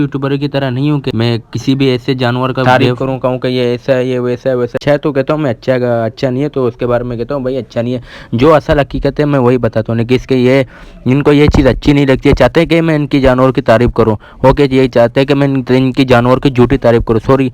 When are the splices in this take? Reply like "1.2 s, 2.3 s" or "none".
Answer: 1.1 s, 2.5 s, 4.7 s